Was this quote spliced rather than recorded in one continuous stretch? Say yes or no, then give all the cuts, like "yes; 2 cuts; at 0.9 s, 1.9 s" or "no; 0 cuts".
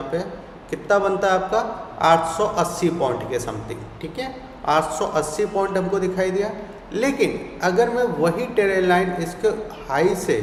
no; 0 cuts